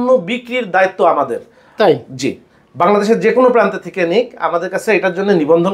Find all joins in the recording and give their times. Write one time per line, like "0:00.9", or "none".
none